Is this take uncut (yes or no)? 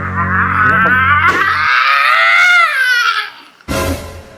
yes